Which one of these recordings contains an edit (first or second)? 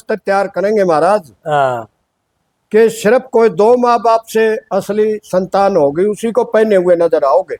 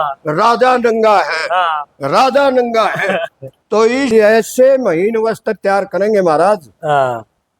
second